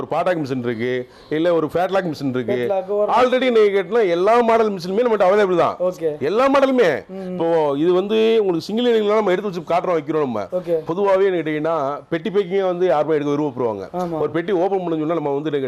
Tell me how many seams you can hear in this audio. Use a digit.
0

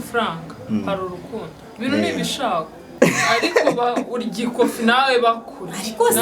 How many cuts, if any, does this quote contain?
1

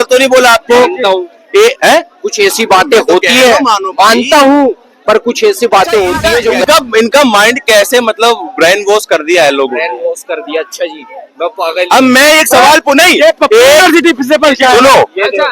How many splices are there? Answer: 1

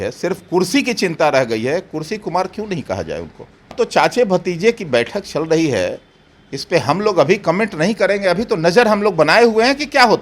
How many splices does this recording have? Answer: 1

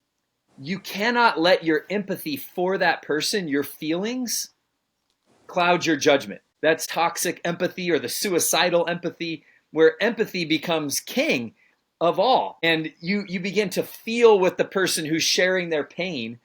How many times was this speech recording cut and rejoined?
2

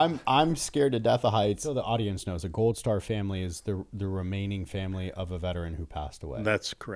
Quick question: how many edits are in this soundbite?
1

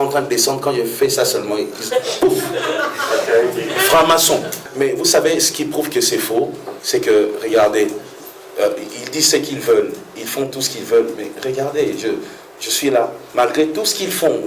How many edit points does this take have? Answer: 2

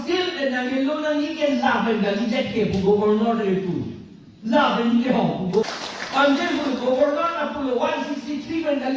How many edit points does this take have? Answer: 1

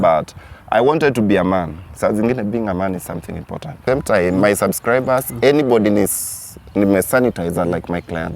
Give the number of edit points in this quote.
1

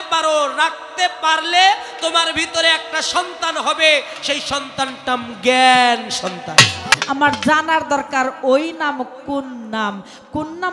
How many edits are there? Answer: 1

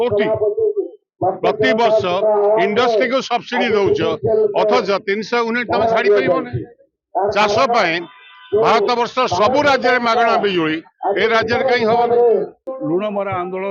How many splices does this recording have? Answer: 1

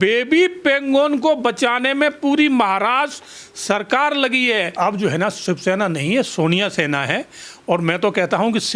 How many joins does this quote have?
1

